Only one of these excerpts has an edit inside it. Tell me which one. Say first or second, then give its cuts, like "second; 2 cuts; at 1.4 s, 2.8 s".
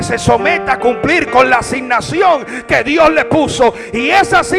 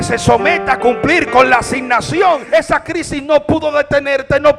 second; 1 cut; at 2.4 s